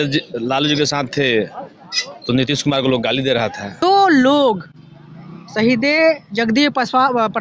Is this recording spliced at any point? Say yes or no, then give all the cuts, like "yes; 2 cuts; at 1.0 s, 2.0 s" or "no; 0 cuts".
yes; 1 cut; at 3.8 s